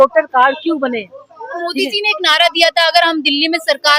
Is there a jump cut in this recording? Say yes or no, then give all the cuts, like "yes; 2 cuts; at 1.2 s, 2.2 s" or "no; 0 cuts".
no; 0 cuts